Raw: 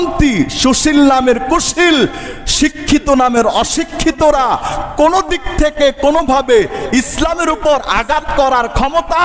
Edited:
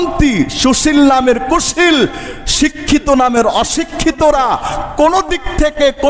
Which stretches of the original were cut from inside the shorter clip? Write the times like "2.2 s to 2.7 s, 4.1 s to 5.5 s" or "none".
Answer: none